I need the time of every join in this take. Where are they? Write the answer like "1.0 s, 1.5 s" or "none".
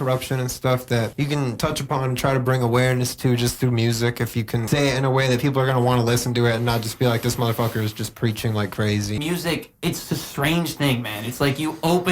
1.5 s, 4.6 s, 9.2 s